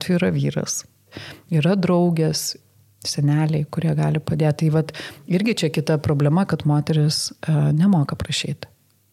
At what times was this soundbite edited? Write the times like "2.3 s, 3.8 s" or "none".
1.1 s, 2.5 s